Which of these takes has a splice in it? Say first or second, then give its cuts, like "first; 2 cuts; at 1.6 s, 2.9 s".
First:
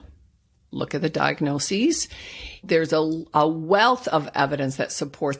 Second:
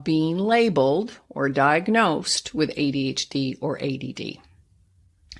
first; 1 cut; at 2.6 s